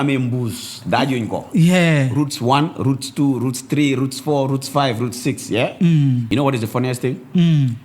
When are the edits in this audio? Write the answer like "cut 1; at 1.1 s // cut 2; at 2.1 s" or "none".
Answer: cut 1; at 6.2 s

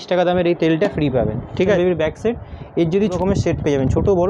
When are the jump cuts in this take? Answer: cut 1; at 1.8 s // cut 2; at 3.2 s

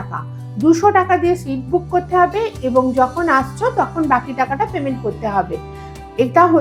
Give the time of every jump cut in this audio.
none

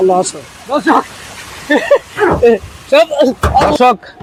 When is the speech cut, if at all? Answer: none

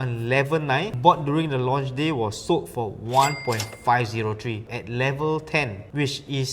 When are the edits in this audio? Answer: cut 1; at 0.9 s // cut 2; at 4.7 s

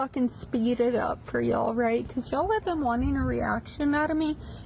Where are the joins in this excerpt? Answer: cut 1; at 2.6 s

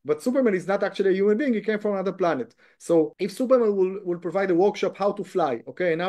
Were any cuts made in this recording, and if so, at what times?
cut 1; at 3.1 s

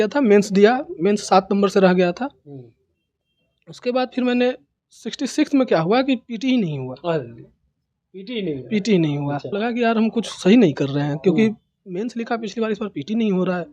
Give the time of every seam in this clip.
cut 1; at 9.4 s

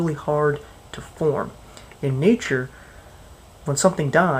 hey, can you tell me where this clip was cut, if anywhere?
cut 1; at 2.6 s

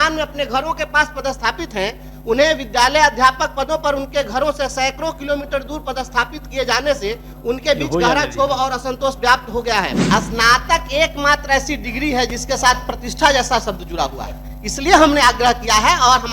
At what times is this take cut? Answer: cut 1; at 10.0 s

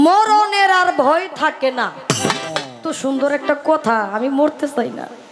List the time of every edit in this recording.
cut 1; at 2.8 s

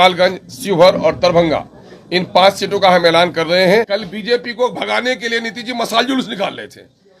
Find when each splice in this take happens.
cut 1; at 3.9 s

